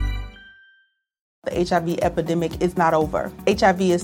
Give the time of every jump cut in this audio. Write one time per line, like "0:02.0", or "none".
0:01.3

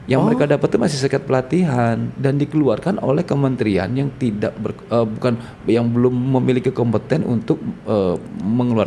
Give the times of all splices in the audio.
none

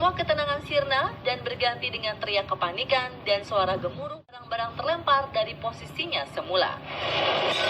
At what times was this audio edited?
0:04.4

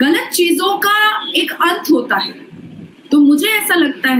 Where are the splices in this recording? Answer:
none

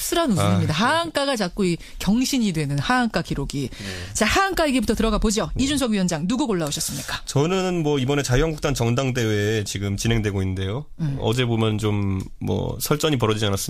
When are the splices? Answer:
0:10.8

